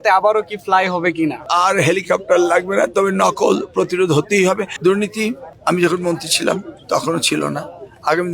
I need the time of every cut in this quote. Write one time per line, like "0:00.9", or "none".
0:01.4
0:04.7